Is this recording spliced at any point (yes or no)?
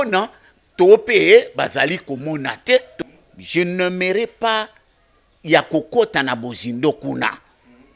yes